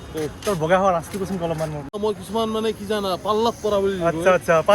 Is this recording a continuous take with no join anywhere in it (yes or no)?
no